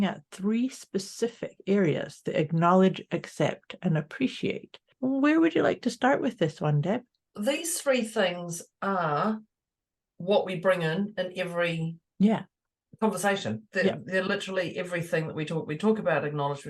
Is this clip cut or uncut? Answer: cut